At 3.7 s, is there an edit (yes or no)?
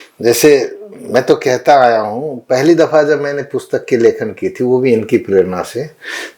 no